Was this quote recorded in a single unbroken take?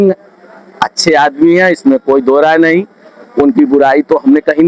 yes; 0 cuts

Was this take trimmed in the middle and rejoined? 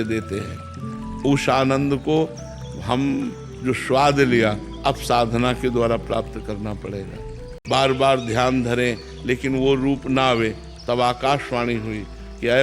yes; 1 cut; at 7.5 s

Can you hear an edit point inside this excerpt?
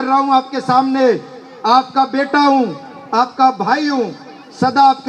no; 0 cuts

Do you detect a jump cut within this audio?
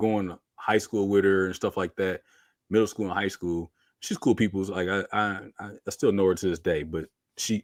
no; 0 cuts

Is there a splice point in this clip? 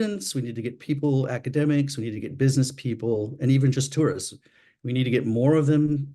no; 0 cuts

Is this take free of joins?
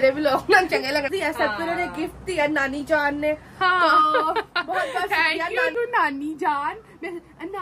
no; 2 cuts; at 1.1 s, 5.7 s

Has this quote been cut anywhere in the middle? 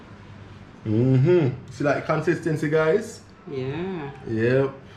no; 0 cuts

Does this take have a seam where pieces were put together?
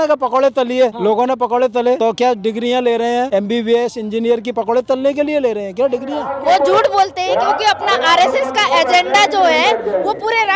yes; 4 cuts; at 1.0 s, 2.0 s, 3.3 s, 6.3 s

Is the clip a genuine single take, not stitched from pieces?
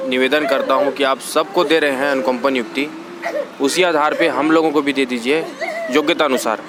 yes; 0 cuts

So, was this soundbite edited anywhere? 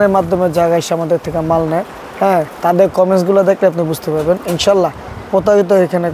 no; 0 cuts

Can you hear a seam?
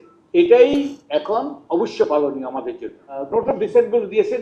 yes; 1 cut; at 3.1 s

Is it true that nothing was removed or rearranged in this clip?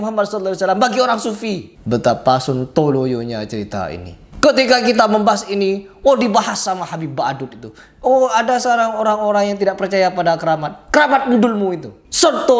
yes; 0 cuts

